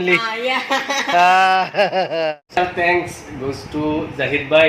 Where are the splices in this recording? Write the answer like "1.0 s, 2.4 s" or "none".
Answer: 2.4 s